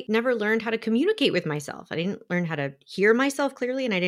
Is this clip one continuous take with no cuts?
yes; 0 cuts

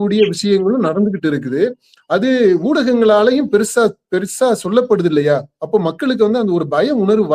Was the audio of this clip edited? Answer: no; 0 cuts

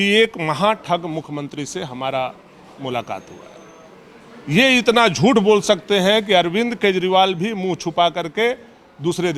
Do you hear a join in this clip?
no; 0 cuts

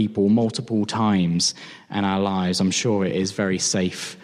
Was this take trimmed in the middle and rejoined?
no; 0 cuts

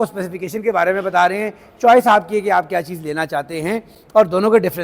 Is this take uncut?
yes; 0 cuts

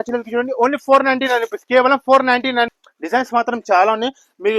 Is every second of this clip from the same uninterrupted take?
no; 1 cut; at 2.8 s

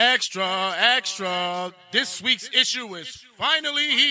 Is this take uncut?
yes; 0 cuts

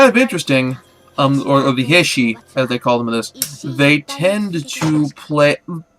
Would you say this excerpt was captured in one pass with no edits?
no; 1 cut; at 2.4 s

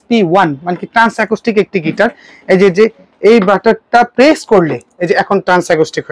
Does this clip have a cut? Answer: no; 0 cuts

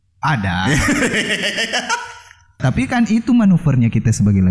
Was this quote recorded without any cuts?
no; 1 cut; at 2.6 s

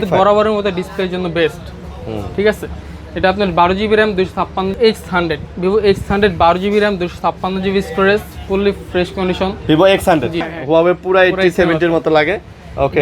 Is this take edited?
yes; 2 cuts; at 4.7 s, 10.5 s

